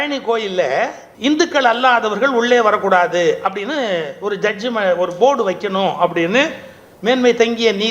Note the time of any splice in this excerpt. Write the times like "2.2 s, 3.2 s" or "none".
1.0 s